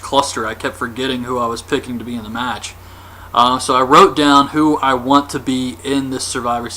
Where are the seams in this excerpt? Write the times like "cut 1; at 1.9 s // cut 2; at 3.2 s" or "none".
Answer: cut 1; at 4.3 s